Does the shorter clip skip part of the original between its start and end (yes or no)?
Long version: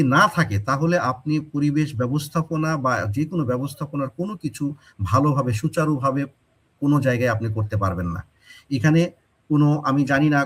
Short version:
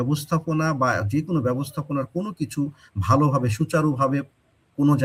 no